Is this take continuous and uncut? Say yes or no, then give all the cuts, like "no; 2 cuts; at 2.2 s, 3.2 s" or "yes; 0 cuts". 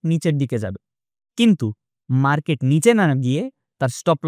yes; 0 cuts